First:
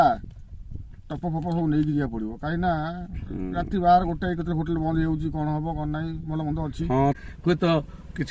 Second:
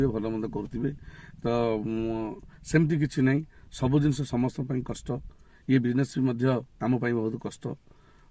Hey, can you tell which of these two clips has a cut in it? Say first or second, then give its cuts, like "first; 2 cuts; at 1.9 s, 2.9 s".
first; 1 cut; at 7.2 s